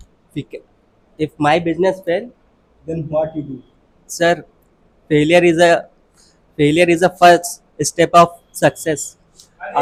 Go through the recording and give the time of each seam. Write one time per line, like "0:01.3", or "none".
none